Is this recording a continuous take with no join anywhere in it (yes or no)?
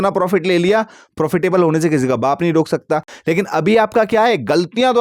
yes